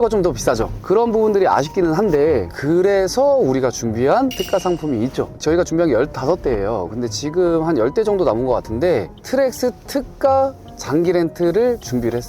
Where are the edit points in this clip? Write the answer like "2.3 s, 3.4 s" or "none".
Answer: 9.1 s